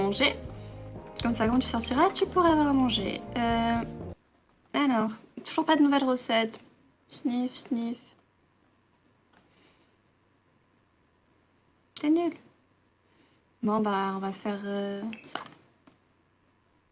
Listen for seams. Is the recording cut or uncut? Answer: cut